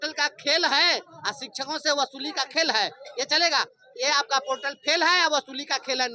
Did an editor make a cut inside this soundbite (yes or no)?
no